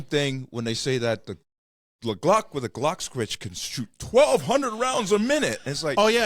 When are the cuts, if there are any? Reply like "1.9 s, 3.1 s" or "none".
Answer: none

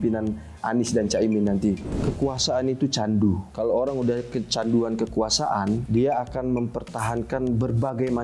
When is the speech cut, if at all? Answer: 1.9 s, 3.5 s, 5.8 s

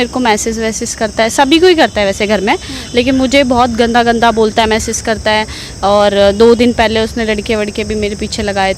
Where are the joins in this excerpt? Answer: none

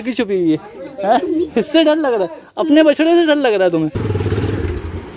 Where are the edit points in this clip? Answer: 4.0 s

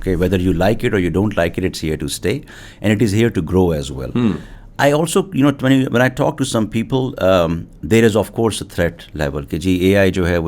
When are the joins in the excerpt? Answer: none

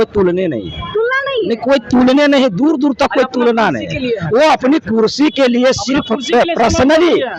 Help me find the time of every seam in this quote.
none

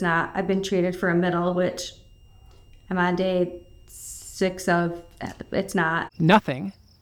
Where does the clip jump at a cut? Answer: none

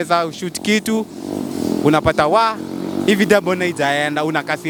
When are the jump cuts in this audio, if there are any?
none

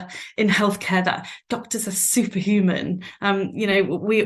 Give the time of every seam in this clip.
none

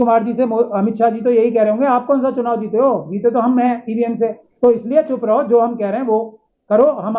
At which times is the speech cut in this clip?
4.4 s

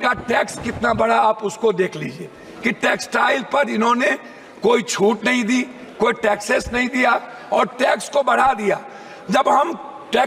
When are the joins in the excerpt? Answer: none

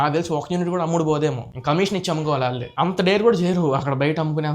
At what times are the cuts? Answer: none

